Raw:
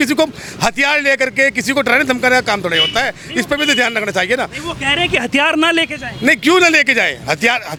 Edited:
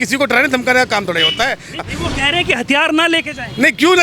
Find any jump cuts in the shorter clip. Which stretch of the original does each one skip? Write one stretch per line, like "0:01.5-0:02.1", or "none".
0:03.3-0:04.4